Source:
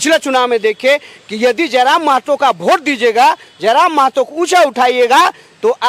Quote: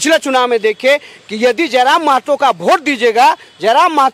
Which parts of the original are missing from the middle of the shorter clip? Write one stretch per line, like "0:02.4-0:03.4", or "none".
none